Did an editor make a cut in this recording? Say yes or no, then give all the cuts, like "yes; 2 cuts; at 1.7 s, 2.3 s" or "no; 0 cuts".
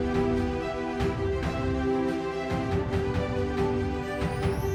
no; 0 cuts